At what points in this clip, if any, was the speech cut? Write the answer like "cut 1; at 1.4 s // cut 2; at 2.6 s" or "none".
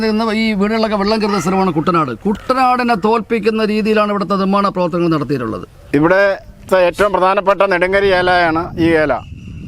cut 1; at 5.7 s